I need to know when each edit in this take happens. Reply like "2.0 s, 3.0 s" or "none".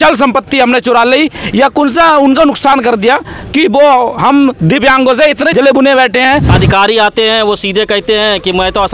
5.5 s, 6.5 s